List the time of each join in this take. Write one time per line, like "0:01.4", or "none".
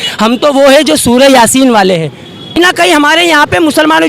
0:02.6